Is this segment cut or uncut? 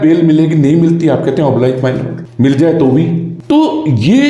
uncut